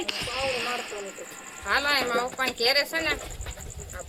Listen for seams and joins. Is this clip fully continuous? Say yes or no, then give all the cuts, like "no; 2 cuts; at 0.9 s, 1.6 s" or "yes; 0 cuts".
yes; 0 cuts